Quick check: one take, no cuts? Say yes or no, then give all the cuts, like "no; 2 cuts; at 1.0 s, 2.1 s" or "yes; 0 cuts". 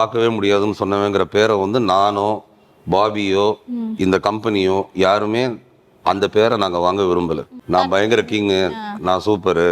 no; 1 cut; at 7.5 s